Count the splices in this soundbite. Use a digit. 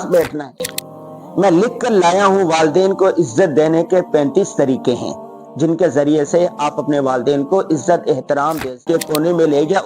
1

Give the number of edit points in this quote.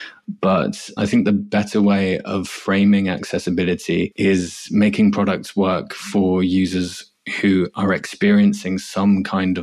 1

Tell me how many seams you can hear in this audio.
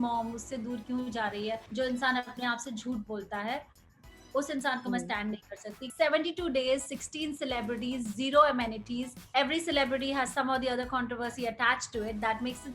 3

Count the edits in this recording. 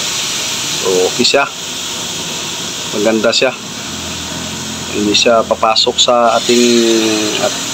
0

